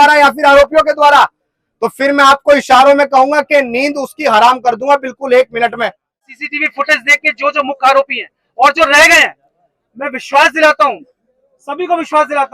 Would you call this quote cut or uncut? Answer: cut